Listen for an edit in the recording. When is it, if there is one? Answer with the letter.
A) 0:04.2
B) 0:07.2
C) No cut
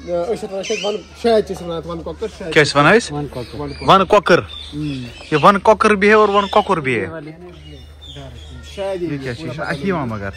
C